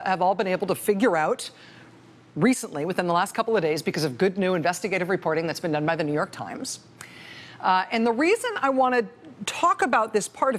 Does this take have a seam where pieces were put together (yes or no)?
no